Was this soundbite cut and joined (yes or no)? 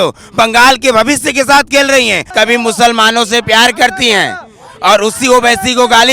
yes